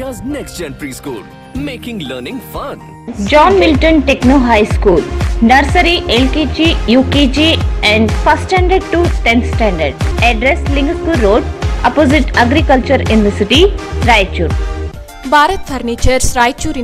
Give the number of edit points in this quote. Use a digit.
2